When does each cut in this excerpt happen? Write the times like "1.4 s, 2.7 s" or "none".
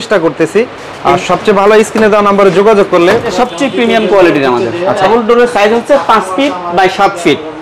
3.3 s, 5.0 s